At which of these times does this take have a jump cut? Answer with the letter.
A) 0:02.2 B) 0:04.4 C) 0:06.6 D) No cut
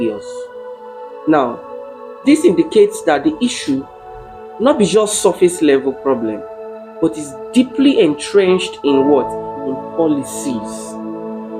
D